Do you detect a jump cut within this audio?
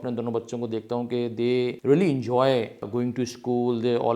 yes; 2 cuts; at 1.8 s, 2.9 s

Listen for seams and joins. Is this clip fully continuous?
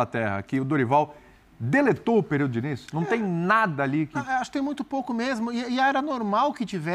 yes; 0 cuts

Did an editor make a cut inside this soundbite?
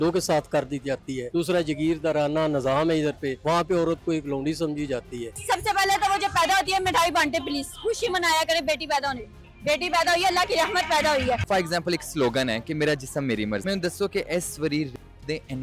yes; 5 cuts; at 1.2 s, 3.3 s, 5.4 s, 11.4 s, 13.6 s

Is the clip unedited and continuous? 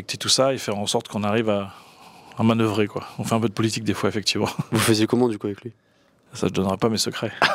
yes; 0 cuts

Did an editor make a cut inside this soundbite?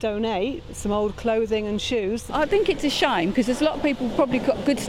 yes; 1 cut; at 2.2 s

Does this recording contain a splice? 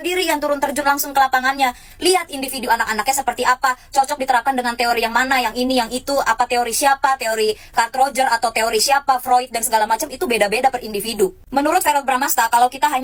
no; 0 cuts

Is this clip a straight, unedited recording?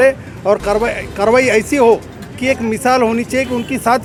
yes; 0 cuts

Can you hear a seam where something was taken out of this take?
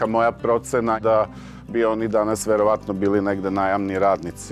yes; 1 cut; at 1.0 s

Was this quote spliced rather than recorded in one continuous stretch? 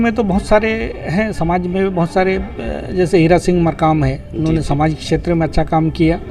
no; 0 cuts

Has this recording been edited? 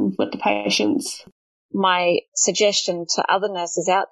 yes; 2 cuts; at 1.2 s, 2.3 s

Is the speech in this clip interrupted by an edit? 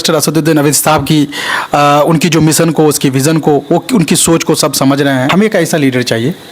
yes; 1 cut; at 5.3 s

